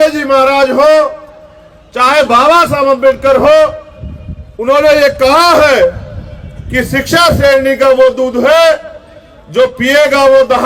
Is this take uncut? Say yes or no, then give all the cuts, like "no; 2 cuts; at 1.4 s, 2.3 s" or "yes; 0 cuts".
yes; 0 cuts